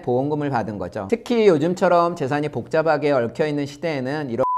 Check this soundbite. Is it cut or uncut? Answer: cut